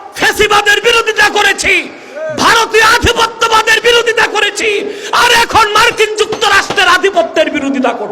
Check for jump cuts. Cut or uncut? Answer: uncut